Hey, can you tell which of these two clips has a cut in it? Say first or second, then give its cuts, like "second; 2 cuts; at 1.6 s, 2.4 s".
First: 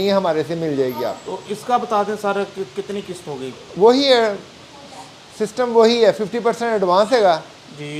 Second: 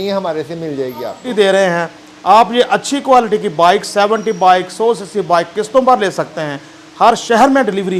second; 1 cut; at 1.3 s